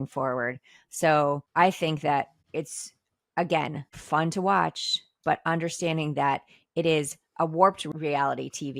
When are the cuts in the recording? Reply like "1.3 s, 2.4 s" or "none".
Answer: 1.4 s, 2.4 s, 3.9 s, 7.9 s